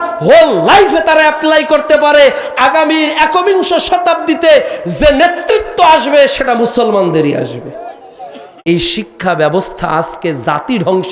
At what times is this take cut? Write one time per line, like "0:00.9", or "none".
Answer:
0:08.5